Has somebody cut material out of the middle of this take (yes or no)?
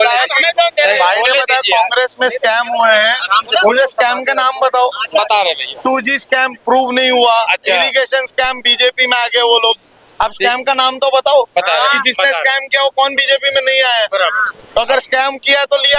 no